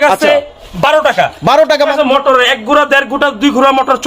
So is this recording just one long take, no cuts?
no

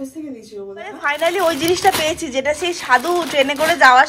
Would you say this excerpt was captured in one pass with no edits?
no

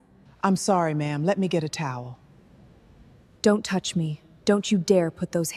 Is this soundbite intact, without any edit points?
yes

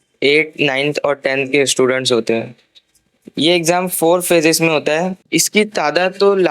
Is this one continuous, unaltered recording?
no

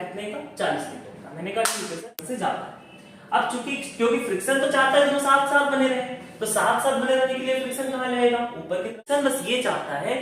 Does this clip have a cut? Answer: yes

